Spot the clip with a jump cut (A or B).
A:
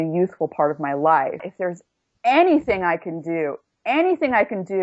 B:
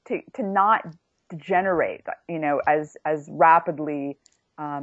A